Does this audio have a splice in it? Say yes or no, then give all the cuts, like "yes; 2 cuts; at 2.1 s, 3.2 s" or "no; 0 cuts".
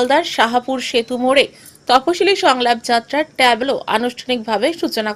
no; 0 cuts